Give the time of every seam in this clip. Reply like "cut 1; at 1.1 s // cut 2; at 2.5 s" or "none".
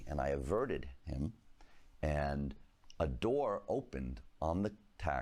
none